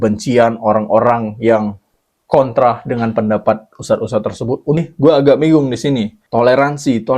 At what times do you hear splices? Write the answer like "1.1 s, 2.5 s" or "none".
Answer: 4.8 s, 6.2 s